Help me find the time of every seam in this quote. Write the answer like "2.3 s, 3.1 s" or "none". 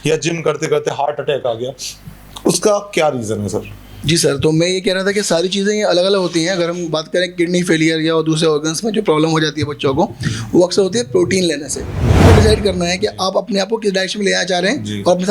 12.2 s